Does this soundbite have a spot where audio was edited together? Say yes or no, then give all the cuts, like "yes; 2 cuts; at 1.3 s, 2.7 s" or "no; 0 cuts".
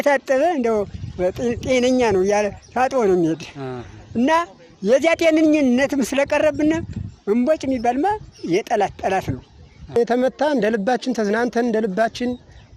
yes; 2 cuts; at 5.8 s, 10.0 s